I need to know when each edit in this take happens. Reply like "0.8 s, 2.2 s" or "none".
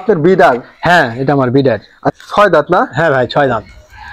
2.0 s